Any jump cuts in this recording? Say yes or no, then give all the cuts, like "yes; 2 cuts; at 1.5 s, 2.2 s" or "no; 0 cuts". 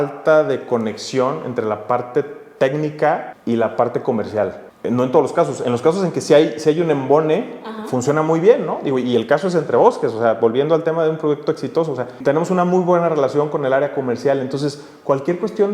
yes; 3 cuts; at 3.3 s, 4.6 s, 12.2 s